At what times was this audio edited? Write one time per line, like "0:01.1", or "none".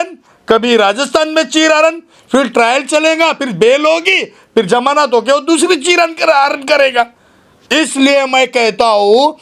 none